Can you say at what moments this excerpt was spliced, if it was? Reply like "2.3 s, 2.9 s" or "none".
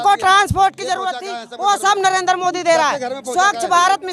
none